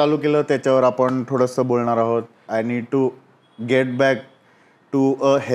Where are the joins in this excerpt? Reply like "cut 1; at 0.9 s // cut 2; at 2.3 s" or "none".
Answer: cut 1; at 2.4 s